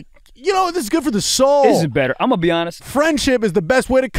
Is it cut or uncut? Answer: uncut